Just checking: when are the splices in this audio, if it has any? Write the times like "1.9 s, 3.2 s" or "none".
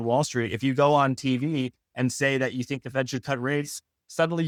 none